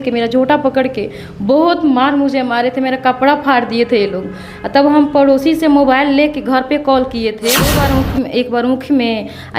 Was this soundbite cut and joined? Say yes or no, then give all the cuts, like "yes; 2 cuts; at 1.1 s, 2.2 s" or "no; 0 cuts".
yes; 1 cut; at 7.6 s